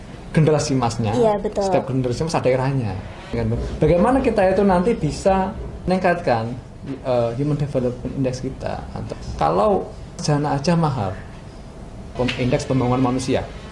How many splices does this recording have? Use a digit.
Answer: 5